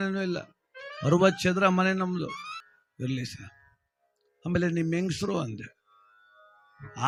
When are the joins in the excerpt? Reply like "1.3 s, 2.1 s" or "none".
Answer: none